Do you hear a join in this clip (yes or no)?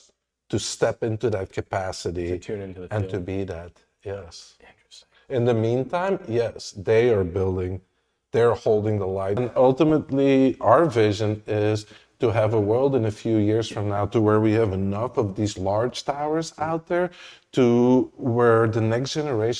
yes